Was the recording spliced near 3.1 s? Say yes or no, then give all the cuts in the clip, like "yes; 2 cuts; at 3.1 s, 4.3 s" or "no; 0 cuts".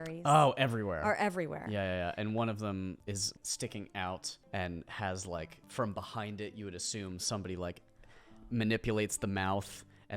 yes; 3 cuts; at 3.1 s, 4.3 s, 5.6 s